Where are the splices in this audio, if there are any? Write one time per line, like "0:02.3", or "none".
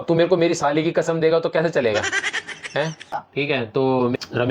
0:03.2